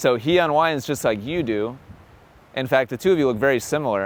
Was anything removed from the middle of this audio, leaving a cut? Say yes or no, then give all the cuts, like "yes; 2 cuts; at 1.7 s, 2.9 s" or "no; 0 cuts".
no; 0 cuts